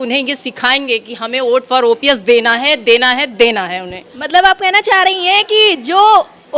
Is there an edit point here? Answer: no; 0 cuts

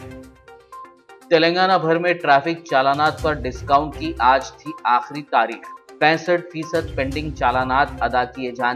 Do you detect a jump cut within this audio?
no; 0 cuts

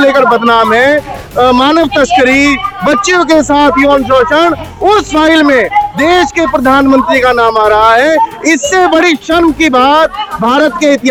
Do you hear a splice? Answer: no; 0 cuts

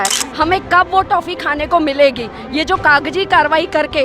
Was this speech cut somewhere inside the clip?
no; 0 cuts

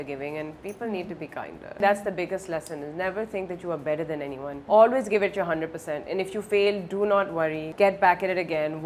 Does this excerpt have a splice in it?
yes; 3 cuts; at 1.8 s, 4.6 s, 7.6 s

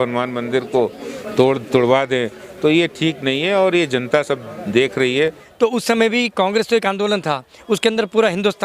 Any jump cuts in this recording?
yes; 1 cut; at 5.4 s

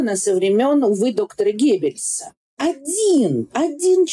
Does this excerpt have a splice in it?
yes; 1 cut; at 2.5 s

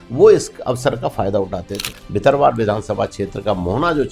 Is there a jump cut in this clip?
yes; 1 cut; at 2.0 s

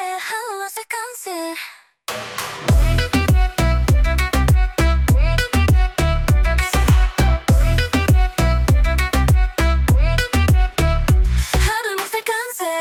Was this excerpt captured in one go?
yes; 0 cuts

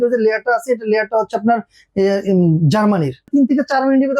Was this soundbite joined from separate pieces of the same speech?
yes; 1 cut; at 3.3 s

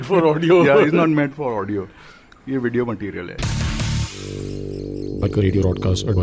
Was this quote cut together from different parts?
yes; 1 cut; at 3.4 s

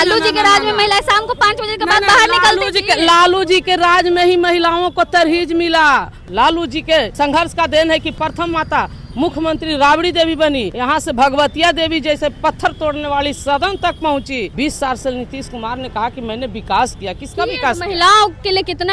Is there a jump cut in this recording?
yes; 5 cuts; at 6.2 s, 7.1 s, 8.2 s, 10.7 s, 14.5 s

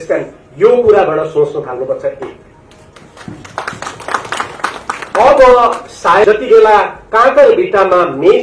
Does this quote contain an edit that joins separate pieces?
yes; 1 cut; at 6.2 s

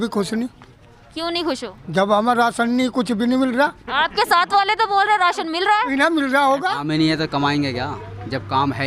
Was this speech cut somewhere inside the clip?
yes; 1 cut; at 6.8 s

